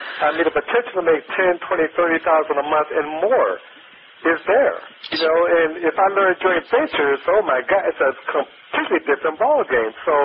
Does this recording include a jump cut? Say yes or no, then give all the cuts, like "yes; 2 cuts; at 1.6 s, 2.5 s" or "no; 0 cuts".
no; 0 cuts